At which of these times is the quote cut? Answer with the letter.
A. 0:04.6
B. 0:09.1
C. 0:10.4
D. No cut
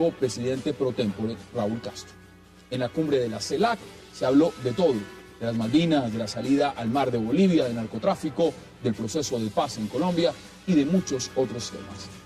A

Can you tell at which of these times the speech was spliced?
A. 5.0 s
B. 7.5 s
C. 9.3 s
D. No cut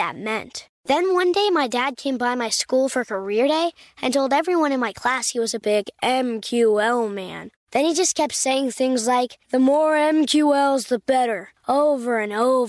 D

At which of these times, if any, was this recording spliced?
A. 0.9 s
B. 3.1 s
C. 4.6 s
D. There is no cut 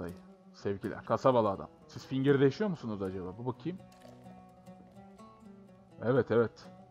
A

